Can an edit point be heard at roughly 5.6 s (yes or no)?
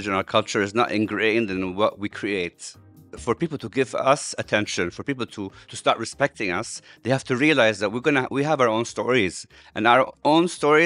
yes